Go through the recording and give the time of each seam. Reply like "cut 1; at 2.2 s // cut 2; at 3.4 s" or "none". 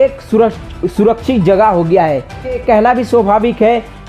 cut 1; at 2.6 s